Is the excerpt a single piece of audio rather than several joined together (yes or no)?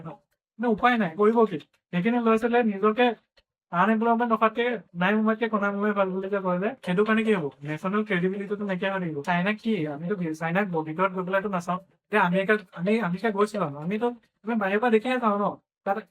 no